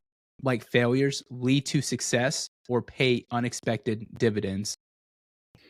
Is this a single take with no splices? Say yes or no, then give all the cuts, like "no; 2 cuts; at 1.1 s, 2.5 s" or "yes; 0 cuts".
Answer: yes; 0 cuts